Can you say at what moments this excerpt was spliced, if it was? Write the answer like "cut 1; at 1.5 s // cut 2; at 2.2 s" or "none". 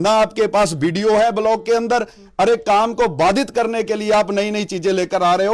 none